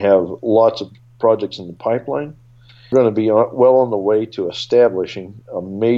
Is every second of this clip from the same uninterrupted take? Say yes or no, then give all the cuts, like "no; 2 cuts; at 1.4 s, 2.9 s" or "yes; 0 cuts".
no; 1 cut; at 2.9 s